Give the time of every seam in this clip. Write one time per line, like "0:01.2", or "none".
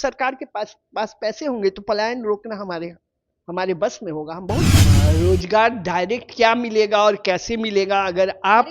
0:04.8